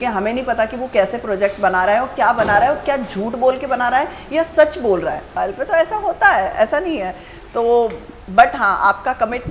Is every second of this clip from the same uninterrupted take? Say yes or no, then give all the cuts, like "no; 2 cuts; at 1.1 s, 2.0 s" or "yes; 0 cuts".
no; 1 cut; at 5.3 s